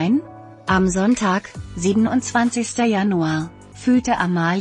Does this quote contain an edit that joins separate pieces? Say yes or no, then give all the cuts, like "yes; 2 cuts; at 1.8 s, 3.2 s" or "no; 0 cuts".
no; 0 cuts